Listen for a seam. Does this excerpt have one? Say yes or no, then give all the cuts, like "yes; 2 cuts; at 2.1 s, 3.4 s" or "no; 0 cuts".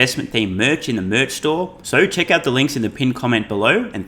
yes; 1 cut; at 1.8 s